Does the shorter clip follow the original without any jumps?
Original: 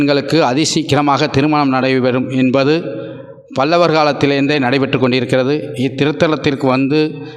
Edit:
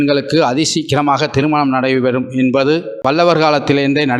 no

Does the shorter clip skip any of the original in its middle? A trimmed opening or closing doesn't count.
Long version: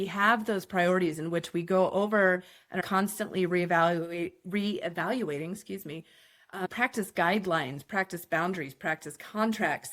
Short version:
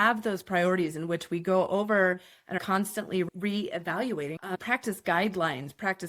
yes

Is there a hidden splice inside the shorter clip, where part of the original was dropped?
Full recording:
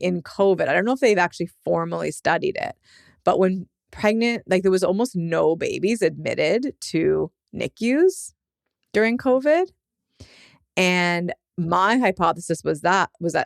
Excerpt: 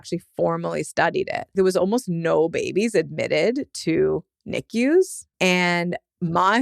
yes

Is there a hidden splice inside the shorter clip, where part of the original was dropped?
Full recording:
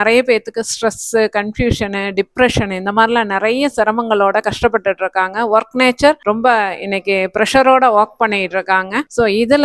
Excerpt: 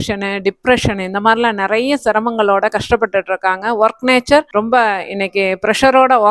no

